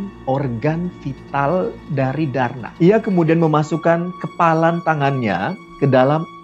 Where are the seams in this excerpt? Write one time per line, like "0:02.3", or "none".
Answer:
0:02.6